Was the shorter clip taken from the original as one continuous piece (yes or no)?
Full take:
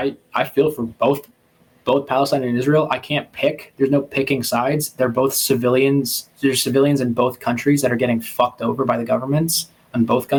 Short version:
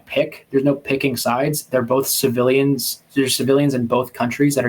yes